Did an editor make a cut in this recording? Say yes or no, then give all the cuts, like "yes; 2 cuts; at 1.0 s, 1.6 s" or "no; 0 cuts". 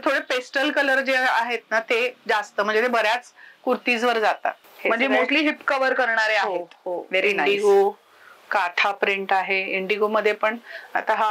yes; 1 cut; at 4.6 s